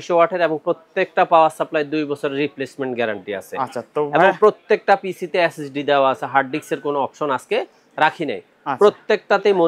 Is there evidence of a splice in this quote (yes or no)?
no